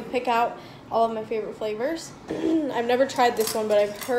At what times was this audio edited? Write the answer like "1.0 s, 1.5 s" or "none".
2.1 s